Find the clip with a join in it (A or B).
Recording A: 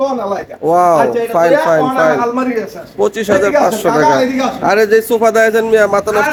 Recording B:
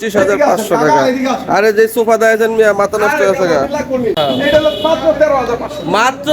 B